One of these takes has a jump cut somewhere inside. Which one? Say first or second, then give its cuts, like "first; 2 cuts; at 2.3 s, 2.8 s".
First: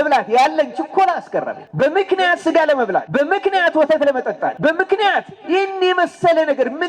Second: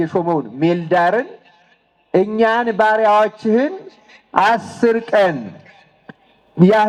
first; 3 cuts; at 1.6 s, 3.1 s, 4.5 s